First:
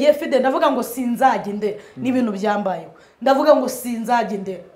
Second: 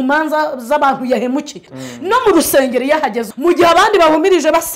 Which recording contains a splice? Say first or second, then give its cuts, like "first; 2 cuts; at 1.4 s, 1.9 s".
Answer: second; 2 cuts; at 1.7 s, 3.3 s